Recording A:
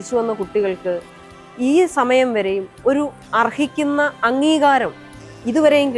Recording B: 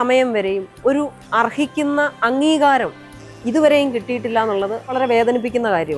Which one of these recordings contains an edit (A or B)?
B